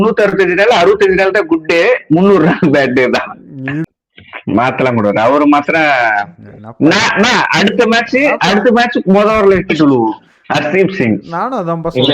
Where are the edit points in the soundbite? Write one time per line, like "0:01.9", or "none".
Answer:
0:03.8